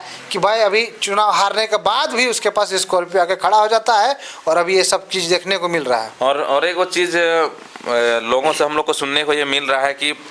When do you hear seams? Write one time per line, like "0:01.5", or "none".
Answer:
none